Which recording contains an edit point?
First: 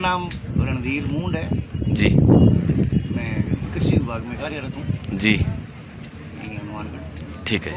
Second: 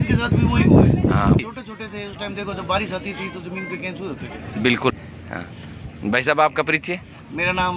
second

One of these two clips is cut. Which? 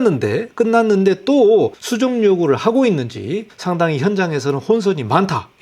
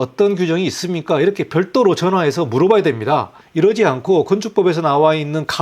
first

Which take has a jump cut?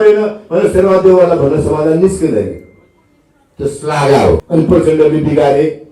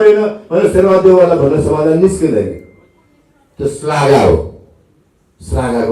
first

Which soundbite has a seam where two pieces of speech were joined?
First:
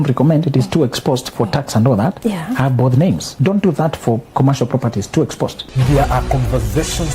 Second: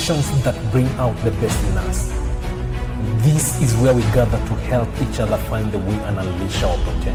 first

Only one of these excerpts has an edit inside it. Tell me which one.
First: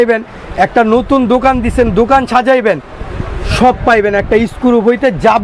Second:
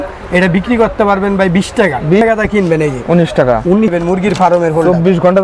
second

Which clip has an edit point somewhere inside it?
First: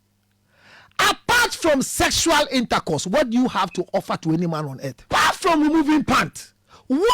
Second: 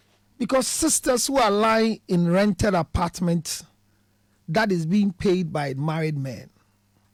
first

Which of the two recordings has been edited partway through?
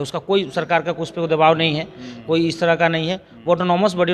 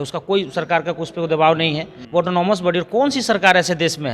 second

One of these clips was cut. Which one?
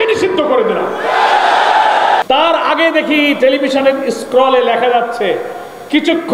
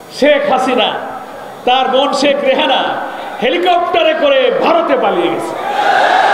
first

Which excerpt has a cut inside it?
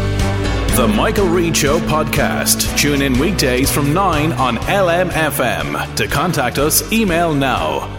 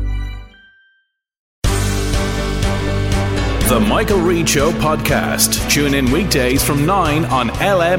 second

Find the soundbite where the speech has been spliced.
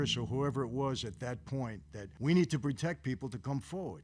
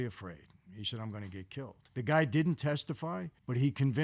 second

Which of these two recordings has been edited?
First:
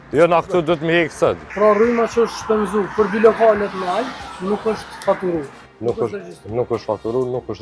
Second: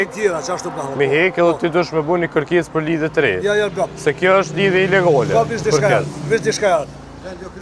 first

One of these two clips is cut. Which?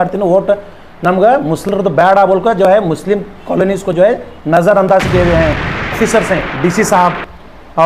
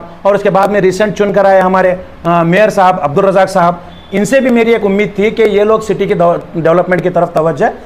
first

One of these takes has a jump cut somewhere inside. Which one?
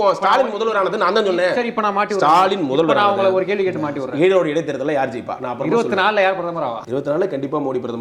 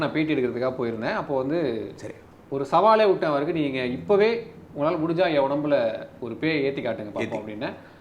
first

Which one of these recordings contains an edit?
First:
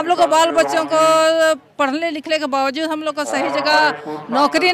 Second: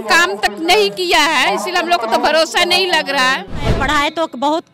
second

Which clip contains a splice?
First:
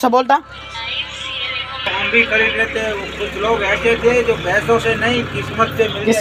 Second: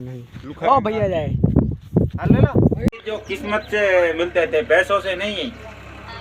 second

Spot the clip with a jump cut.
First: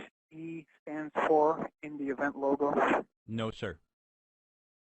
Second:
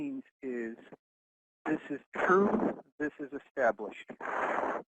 first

